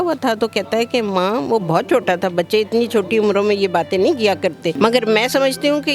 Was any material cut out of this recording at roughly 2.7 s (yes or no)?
no